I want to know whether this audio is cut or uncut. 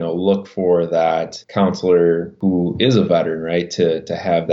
cut